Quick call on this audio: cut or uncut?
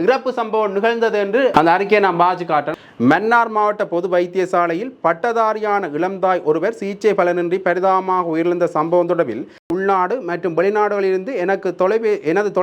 cut